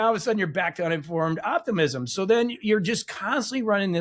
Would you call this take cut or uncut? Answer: uncut